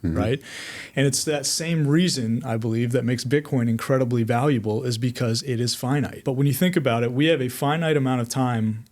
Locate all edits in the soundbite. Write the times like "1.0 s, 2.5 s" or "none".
6.2 s